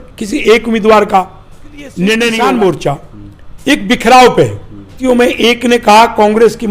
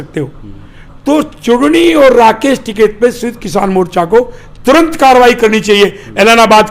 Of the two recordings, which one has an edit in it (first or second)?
first